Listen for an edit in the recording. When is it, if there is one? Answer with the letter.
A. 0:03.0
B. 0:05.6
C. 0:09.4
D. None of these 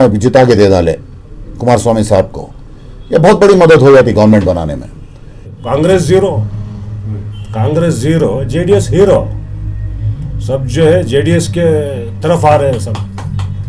B